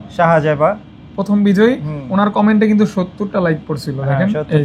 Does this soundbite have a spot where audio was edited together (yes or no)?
no